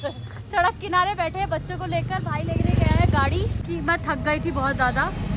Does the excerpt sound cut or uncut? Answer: uncut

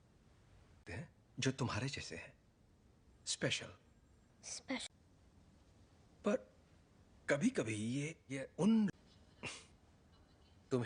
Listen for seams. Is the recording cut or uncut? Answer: uncut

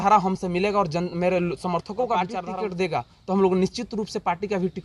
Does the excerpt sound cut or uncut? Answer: cut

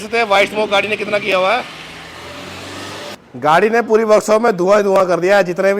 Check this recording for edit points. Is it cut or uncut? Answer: cut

